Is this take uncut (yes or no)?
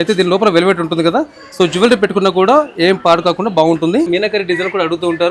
no